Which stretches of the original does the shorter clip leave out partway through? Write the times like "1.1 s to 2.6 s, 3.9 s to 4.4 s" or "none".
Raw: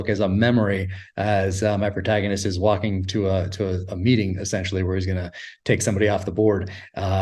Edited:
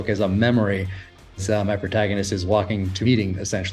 1.3 s to 1.4 s, 3.1 s to 3.9 s

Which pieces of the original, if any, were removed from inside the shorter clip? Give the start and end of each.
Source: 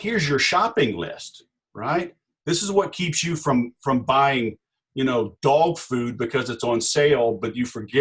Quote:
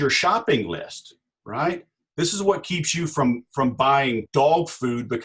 4.5 s to 5.3 s

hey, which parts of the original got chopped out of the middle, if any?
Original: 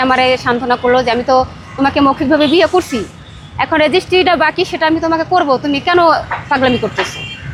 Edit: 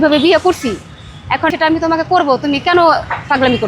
3.8 s to 4.7 s

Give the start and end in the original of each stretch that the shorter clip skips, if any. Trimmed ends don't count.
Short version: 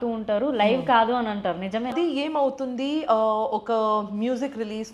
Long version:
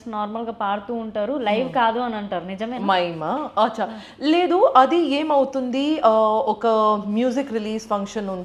2.8 s to 4.9 s

